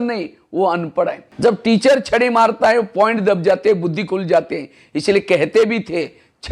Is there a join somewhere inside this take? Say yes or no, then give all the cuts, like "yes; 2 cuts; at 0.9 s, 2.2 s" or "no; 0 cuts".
yes; 1 cut; at 1.2 s